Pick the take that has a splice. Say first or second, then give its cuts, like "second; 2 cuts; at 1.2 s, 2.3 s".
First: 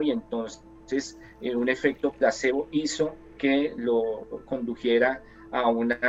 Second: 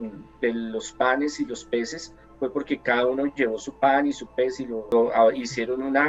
second; 1 cut; at 4.8 s